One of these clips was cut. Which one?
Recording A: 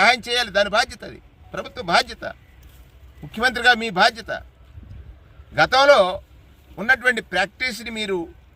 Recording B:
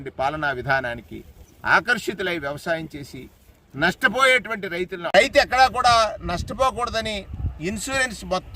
B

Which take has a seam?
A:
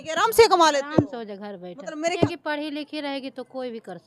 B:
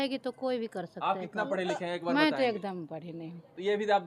A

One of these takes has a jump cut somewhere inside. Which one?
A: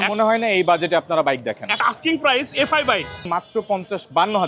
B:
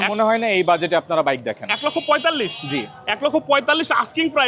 A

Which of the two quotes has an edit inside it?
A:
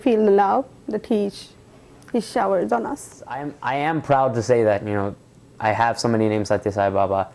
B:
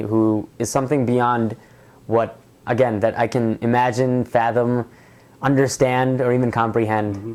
A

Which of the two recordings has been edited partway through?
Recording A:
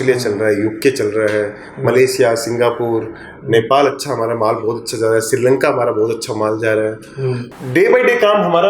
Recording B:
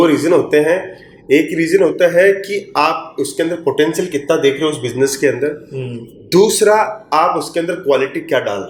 A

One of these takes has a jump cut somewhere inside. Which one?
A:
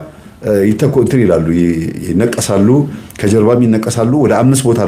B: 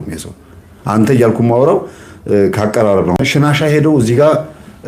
B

